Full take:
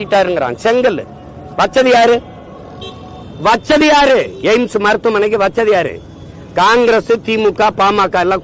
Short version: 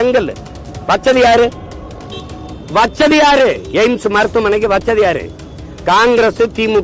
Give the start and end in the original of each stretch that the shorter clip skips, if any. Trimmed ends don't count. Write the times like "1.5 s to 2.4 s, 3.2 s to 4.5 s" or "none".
none